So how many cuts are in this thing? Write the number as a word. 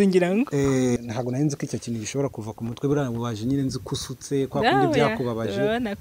one